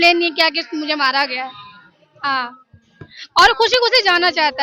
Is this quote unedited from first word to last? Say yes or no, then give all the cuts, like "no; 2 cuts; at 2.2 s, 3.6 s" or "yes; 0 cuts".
yes; 0 cuts